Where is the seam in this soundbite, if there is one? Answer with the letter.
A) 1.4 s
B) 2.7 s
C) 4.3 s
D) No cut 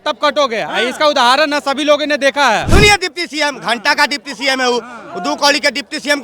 B